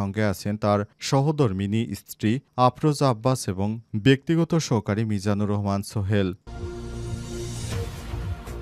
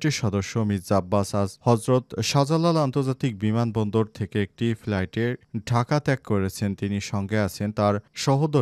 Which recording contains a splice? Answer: first; 1 cut; at 6.4 s

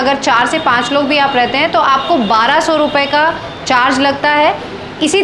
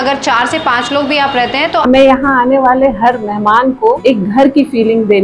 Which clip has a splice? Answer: second; 2 cuts; at 1.8 s, 4.0 s

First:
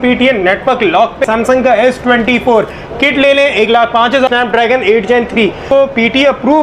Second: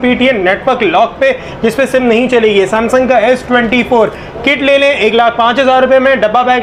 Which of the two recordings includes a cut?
first; 3 cuts; at 1.2 s, 4.3 s, 5.6 s

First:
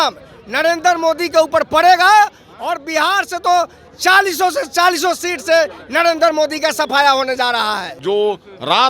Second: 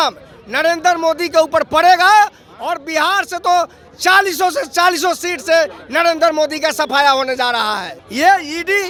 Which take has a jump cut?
first; 1 cut; at 7.9 s

